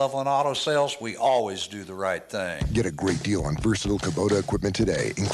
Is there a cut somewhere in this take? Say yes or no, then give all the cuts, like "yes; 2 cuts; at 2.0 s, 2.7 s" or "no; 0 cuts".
yes; 1 cut; at 2.6 s